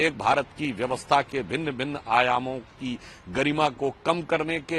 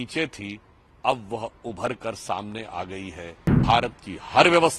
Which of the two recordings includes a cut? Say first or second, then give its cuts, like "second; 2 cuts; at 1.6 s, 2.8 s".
second; 1 cut; at 3.6 s